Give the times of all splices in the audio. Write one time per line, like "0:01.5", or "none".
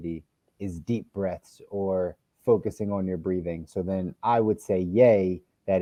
none